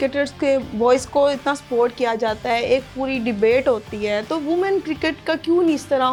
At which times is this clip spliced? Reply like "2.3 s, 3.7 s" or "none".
none